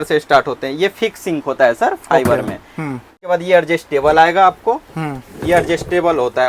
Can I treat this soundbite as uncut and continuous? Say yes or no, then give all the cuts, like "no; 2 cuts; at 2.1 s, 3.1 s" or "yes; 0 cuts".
no; 1 cut; at 3.2 s